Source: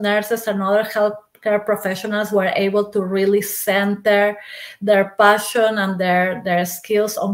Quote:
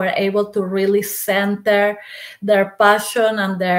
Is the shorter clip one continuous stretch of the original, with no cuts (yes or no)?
yes